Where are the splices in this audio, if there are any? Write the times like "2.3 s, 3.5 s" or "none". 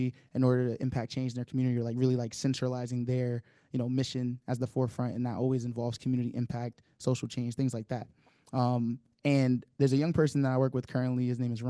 none